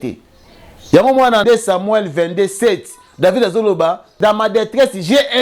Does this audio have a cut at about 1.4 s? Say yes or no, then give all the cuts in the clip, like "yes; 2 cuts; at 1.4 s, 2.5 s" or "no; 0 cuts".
yes; 2 cuts; at 1.4 s, 4.1 s